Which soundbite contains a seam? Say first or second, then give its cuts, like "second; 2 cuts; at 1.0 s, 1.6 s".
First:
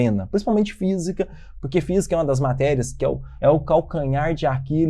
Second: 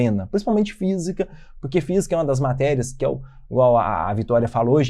first; 1 cut; at 3.3 s